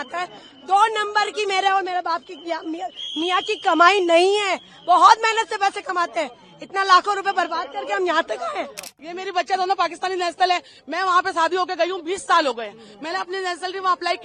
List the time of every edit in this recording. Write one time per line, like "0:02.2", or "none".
0:09.0